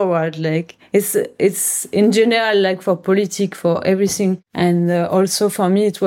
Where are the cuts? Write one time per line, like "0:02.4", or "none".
0:04.5